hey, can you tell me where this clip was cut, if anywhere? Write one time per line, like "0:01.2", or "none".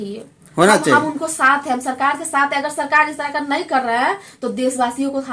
none